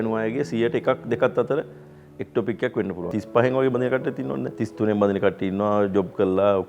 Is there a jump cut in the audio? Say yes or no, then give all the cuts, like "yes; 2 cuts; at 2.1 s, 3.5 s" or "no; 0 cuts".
yes; 2 cuts; at 3.1 s, 4.6 s